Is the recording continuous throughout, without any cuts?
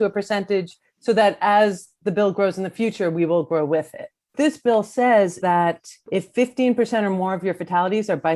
no; 2 cuts; at 4.3 s, 5.4 s

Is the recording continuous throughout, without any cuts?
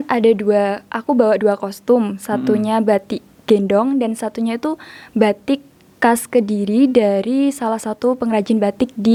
yes; 0 cuts

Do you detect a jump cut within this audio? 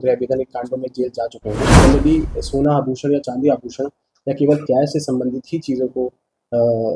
yes; 1 cut; at 1.7 s

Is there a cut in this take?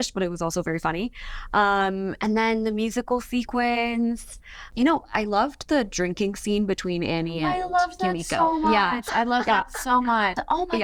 no; 0 cuts

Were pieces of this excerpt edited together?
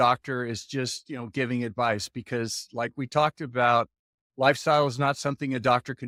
no; 0 cuts

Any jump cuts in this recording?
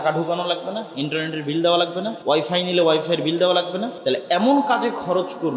yes; 2 cuts; at 2.1 s, 3.9 s

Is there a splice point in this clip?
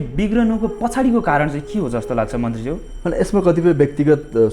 no; 0 cuts

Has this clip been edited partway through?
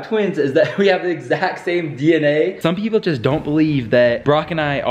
yes; 1 cut; at 2.6 s

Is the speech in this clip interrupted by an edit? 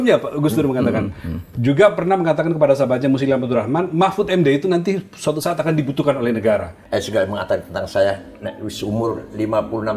yes; 1 cut; at 6.8 s

